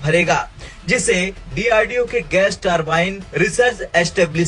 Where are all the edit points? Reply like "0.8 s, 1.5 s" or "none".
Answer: none